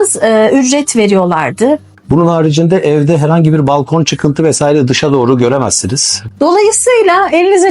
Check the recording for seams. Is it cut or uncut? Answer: cut